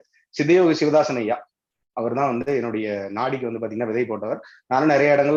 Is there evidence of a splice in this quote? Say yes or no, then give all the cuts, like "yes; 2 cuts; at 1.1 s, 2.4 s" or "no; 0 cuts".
no; 0 cuts